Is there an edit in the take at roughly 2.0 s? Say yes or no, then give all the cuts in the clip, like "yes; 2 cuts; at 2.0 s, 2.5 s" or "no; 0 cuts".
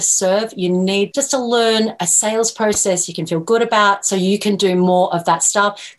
yes; 2 cuts; at 1.1 s, 2.0 s